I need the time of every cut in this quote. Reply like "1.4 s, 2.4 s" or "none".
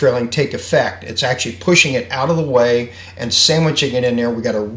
none